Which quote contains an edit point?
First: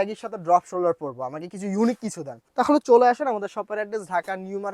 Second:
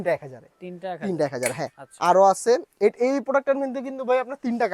first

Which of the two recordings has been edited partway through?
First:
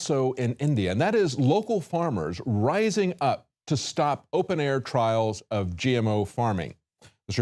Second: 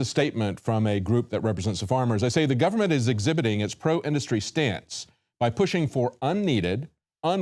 first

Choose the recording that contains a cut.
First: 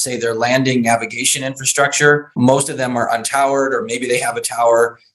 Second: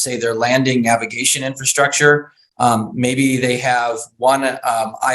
first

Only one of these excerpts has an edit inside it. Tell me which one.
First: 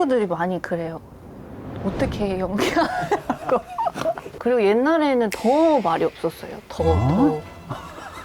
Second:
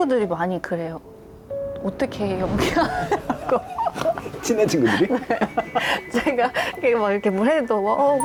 first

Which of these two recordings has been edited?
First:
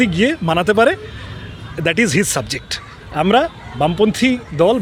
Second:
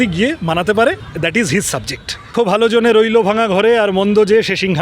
second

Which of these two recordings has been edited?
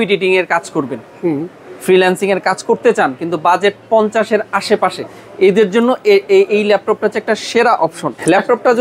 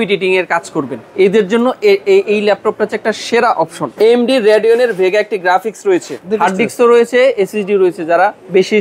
second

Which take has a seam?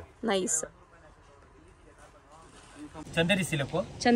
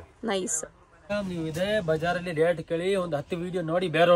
second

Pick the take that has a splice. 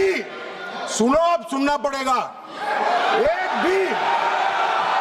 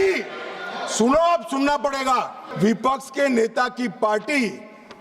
second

